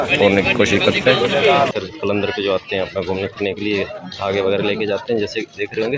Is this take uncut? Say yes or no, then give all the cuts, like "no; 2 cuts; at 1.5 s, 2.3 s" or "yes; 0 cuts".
no; 1 cut; at 1.7 s